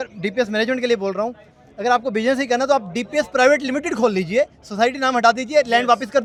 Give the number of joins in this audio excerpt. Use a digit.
0